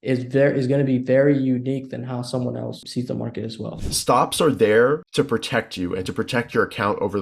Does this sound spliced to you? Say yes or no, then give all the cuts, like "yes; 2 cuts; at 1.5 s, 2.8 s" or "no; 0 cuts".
yes; 3 cuts; at 2.8 s, 3.7 s, 5.1 s